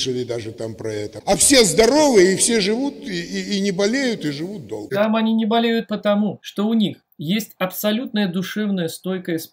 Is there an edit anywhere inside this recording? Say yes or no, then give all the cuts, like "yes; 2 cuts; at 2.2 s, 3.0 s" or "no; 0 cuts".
yes; 4 cuts; at 1.1 s, 4.8 s, 6.4 s, 7.1 s